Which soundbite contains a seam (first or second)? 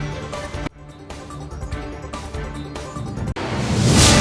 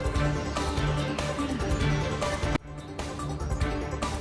first